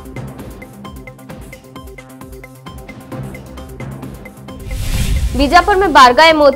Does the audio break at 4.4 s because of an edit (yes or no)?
yes